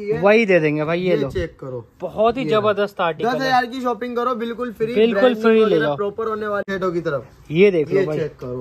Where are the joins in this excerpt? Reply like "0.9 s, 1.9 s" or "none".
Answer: 6.6 s